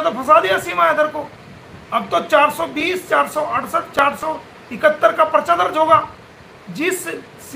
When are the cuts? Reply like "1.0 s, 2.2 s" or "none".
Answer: none